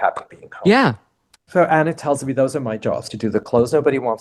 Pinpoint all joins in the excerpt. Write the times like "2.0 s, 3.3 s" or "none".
1.4 s, 3.1 s